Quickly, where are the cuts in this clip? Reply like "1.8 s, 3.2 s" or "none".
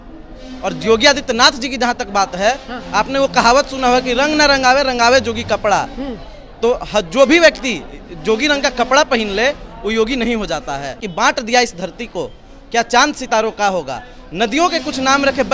11.1 s